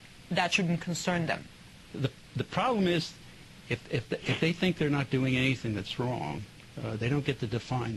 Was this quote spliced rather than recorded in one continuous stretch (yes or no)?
no